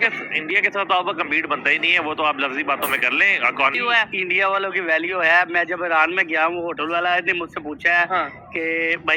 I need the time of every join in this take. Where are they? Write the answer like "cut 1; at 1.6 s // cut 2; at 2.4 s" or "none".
cut 1; at 3.8 s